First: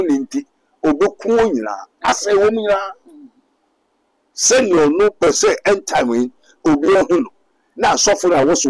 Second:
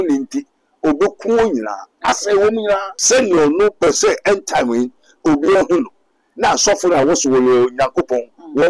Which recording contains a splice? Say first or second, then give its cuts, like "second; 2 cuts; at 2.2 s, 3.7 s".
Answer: second; 1 cut; at 2.9 s